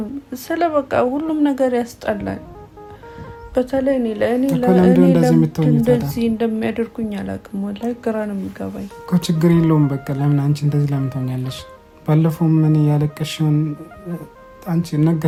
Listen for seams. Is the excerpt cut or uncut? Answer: uncut